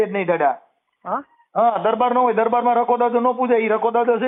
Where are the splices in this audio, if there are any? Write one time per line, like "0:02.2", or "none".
none